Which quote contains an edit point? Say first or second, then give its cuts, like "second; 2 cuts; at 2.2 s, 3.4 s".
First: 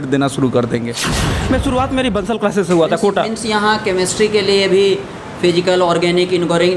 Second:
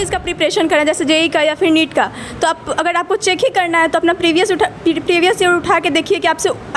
first; 1 cut; at 0.9 s